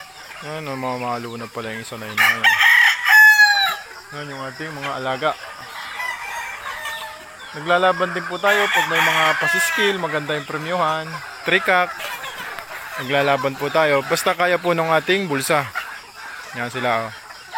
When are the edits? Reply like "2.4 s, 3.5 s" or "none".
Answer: none